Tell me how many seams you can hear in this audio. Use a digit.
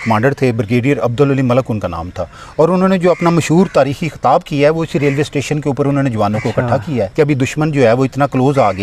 1